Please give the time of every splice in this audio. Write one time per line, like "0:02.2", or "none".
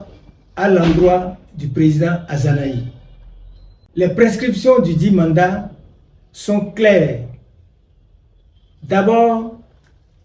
none